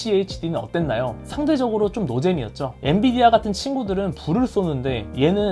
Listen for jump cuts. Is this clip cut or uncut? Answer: uncut